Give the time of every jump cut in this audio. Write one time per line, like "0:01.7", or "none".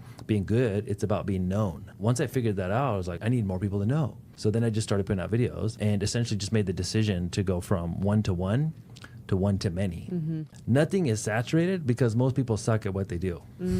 0:01.9
0:03.2
0:04.2
0:05.7
0:10.4